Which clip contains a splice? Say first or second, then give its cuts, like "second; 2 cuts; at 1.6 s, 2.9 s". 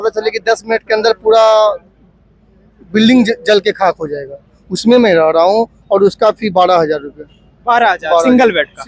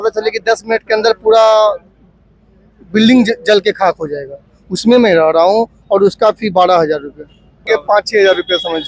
second; 1 cut; at 7.7 s